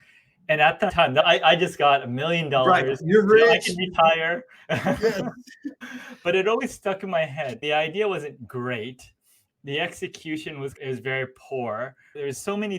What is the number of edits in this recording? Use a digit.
3